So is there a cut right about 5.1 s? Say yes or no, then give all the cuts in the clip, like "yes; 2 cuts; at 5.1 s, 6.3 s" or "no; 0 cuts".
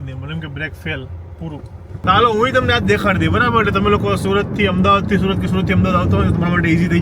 no; 1 cut; at 2.0 s